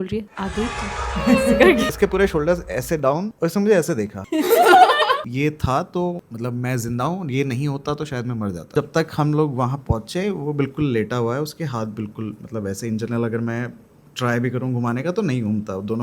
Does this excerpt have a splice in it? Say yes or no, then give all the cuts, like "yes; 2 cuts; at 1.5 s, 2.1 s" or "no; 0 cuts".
yes; 3 cuts; at 1.9 s, 5.2 s, 8.7 s